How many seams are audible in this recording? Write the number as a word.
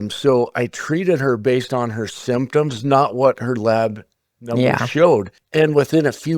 one